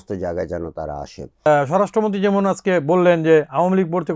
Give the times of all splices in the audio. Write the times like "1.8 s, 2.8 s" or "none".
1.5 s